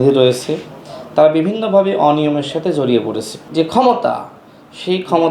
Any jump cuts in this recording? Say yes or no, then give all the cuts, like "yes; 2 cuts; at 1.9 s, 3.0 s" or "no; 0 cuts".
yes; 1 cut; at 3.3 s